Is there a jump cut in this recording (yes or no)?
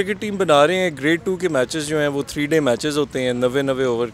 no